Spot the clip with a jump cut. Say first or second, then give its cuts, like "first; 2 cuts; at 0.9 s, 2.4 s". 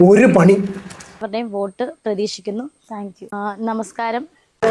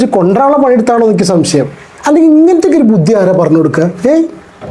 first; 1 cut; at 1.3 s